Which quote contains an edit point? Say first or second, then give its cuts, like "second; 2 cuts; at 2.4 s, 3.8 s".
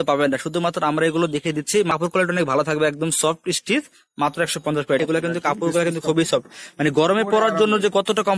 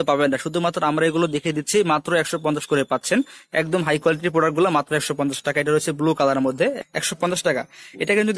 first; 2 cuts; at 1.9 s, 5.0 s